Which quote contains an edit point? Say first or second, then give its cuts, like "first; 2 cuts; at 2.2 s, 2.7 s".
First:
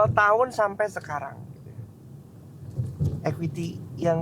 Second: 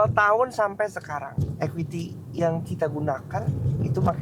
second; 1 cut; at 1.3 s